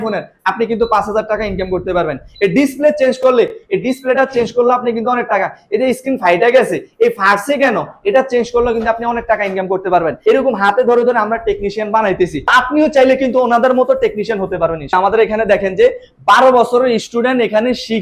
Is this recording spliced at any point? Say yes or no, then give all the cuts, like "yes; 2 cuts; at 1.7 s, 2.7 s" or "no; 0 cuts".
yes; 2 cuts; at 10.2 s, 14.9 s